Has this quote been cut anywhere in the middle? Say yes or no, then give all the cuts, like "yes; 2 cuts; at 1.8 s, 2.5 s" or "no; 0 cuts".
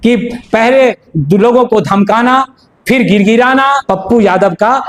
yes; 1 cut; at 3.8 s